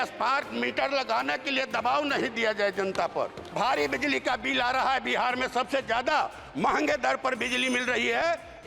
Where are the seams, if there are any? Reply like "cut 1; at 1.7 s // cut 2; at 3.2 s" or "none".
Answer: cut 1; at 3.5 s